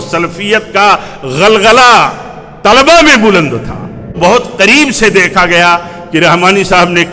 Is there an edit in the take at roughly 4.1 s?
yes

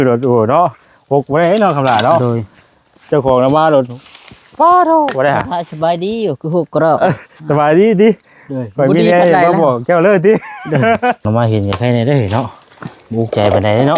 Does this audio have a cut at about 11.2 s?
yes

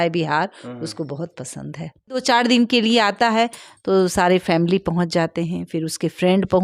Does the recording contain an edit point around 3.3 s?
no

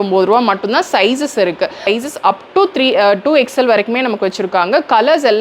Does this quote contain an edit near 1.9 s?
yes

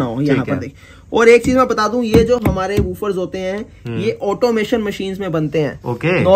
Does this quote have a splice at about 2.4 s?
no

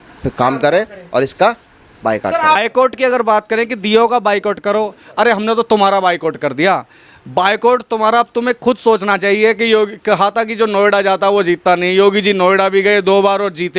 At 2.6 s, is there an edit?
yes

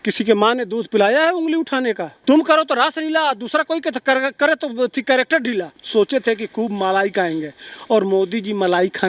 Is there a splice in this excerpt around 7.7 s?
no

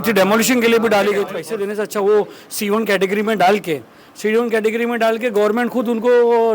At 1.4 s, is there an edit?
yes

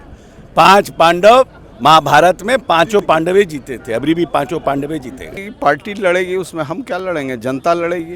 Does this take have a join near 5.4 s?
yes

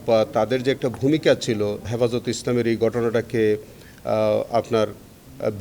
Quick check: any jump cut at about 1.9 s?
yes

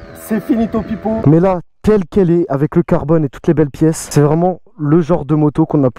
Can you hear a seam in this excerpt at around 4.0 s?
yes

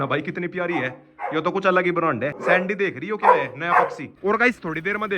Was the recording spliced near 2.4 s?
yes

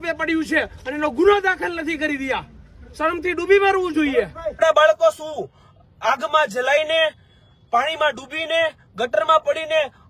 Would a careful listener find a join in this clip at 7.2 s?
no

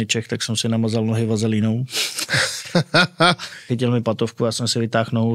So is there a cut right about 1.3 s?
no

